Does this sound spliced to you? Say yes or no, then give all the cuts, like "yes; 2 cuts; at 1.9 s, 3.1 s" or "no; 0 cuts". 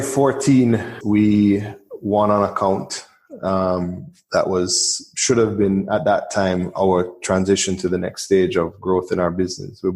yes; 1 cut; at 0.9 s